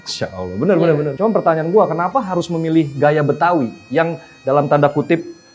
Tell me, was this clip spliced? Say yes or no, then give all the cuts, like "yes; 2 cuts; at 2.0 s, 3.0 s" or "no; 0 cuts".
yes; 1 cut; at 1.1 s